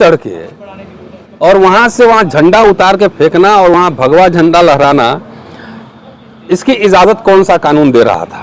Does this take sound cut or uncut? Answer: uncut